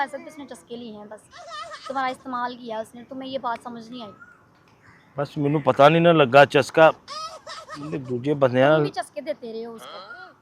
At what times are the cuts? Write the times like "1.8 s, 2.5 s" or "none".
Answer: none